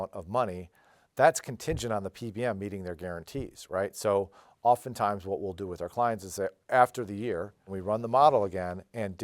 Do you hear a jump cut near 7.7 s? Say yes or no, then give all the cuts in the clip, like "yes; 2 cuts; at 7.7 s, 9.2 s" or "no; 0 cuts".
yes; 1 cut; at 7.7 s